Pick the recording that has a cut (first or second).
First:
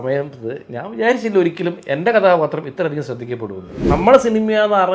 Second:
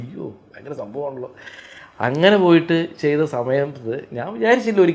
first